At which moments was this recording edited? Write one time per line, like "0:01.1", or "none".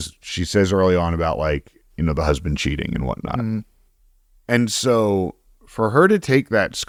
none